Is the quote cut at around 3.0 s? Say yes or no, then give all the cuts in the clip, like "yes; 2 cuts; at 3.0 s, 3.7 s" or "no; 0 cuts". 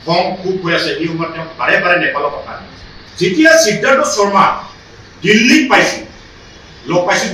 yes; 1 cut; at 3.0 s